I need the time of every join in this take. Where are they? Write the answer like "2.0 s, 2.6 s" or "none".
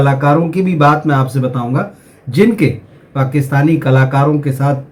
none